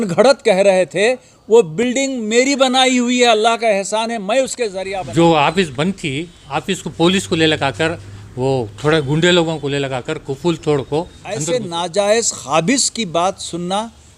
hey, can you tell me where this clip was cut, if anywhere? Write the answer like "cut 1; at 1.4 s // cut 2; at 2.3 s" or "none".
cut 1; at 4.8 s // cut 2; at 11.2 s